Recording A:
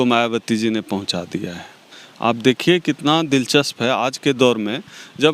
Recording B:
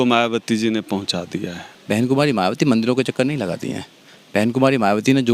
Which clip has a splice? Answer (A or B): B